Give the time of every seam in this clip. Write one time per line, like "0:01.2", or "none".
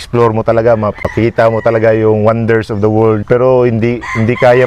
0:01.1
0:03.2